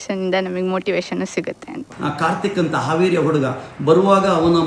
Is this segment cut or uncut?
cut